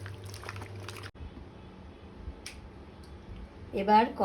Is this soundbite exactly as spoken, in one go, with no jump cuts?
no; 1 cut; at 1.1 s

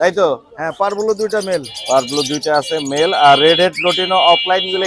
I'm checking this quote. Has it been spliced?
no; 0 cuts

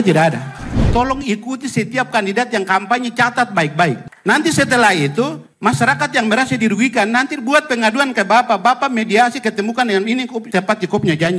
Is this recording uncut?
no; 3 cuts; at 0.9 s, 4.1 s, 10.4 s

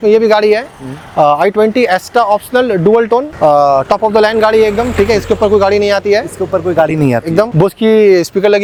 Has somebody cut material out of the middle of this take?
no; 0 cuts

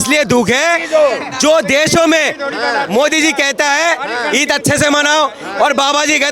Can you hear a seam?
no; 0 cuts

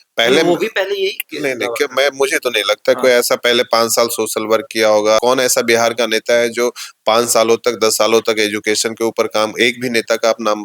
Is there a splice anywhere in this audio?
yes; 1 cut; at 5.2 s

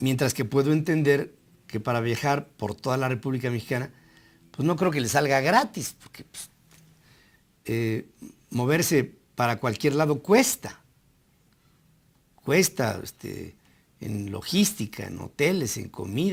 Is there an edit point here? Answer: no; 0 cuts

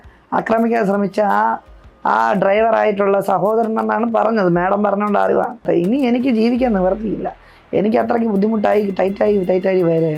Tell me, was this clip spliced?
yes; 1 cut; at 5.6 s

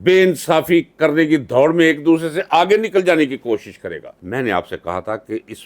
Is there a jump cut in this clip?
yes; 1 cut; at 4.1 s

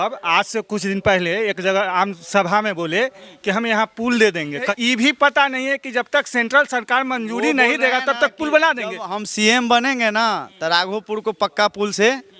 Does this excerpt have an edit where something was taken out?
yes; 1 cut; at 4.7 s

